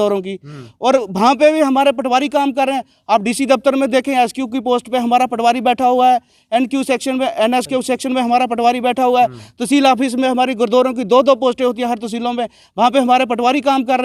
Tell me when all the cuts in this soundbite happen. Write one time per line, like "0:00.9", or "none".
none